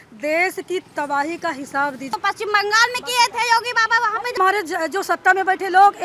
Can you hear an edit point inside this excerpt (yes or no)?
yes